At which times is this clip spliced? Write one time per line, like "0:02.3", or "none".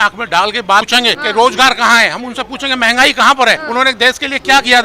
0:01.0
0:03.6

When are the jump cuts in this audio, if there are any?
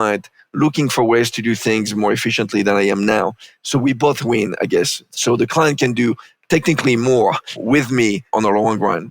0:06.3
0:07.5
0:08.3

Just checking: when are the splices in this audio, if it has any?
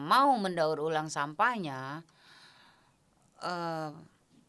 none

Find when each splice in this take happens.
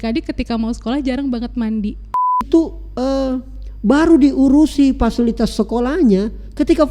0:02.5

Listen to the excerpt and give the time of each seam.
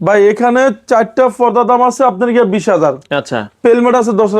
none

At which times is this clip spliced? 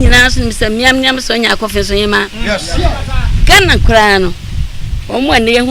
none

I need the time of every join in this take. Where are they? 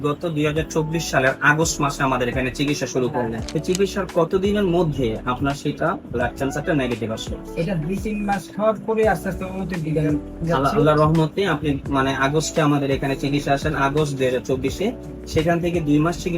0:03.5

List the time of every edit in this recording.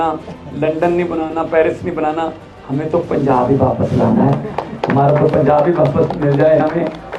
none

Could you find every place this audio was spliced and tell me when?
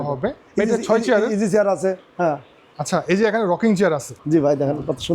0:04.1

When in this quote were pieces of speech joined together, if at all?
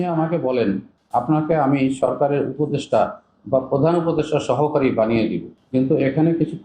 0:00.9
0:05.5

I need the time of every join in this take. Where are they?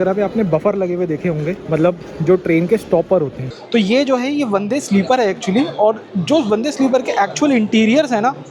0:01.6
0:03.5

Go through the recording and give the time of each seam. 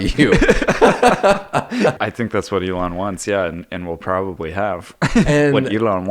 0:02.0

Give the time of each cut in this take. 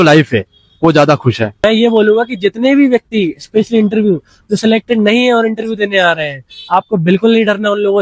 0:01.5

